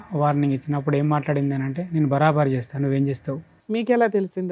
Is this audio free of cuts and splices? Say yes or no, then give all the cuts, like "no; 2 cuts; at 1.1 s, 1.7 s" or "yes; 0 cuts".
no; 1 cut; at 3.5 s